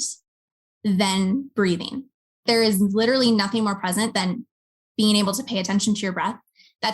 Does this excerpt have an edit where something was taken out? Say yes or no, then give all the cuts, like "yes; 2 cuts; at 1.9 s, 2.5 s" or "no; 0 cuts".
yes; 1 cut; at 2.4 s